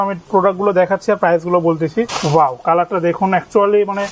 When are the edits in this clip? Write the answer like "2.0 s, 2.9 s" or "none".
2.2 s